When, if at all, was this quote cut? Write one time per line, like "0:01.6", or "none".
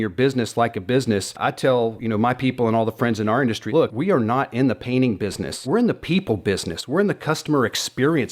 0:01.7
0:03.7
0:05.5